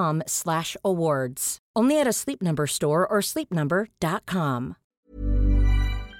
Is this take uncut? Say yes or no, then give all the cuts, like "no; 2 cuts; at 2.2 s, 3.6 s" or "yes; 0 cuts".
no; 1 cut; at 4.9 s